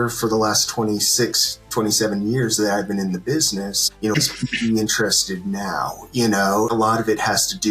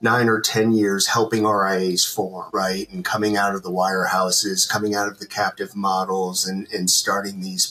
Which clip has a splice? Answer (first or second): first